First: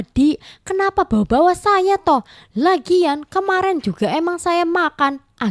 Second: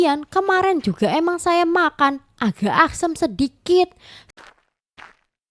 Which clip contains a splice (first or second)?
second